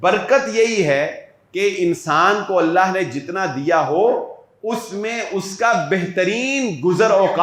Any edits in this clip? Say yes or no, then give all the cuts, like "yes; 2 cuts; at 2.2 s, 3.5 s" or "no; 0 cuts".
no; 0 cuts